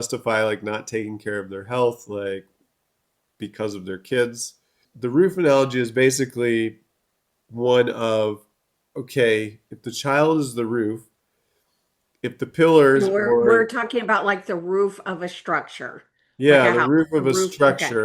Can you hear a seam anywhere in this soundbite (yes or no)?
yes